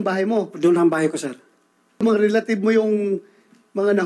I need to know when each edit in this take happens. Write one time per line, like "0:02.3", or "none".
0:02.0